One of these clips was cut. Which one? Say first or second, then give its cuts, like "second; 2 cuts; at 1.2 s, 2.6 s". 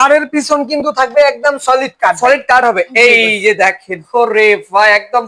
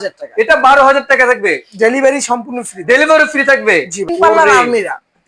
second; 1 cut; at 4.1 s